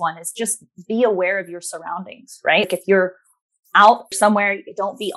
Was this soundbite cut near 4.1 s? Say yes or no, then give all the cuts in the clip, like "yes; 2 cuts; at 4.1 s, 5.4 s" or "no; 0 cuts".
yes; 2 cuts; at 2.6 s, 4.1 s